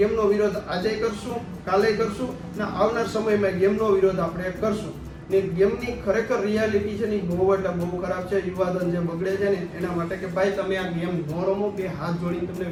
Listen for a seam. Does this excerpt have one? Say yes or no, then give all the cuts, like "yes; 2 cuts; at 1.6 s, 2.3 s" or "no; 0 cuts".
no; 0 cuts